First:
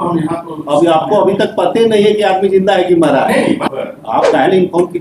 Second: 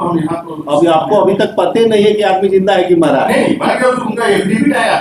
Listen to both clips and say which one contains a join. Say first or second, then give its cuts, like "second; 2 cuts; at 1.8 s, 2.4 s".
first; 1 cut; at 3.6 s